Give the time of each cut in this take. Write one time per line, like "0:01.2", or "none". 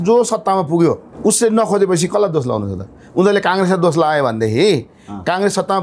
0:01.1